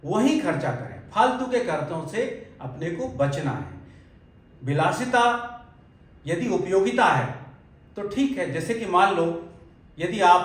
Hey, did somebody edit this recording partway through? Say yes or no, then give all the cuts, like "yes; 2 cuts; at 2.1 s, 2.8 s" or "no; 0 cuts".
no; 0 cuts